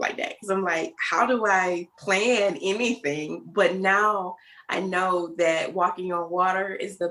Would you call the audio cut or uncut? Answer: cut